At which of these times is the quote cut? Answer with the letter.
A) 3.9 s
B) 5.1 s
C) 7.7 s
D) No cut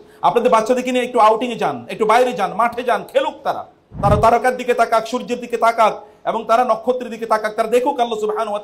A